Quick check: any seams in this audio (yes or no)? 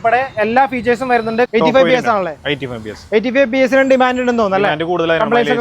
yes